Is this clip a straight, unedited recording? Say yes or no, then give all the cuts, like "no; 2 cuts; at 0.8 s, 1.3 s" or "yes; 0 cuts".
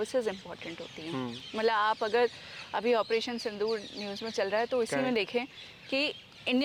yes; 0 cuts